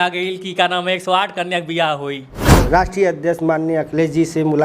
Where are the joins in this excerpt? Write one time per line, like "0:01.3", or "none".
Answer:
0:02.6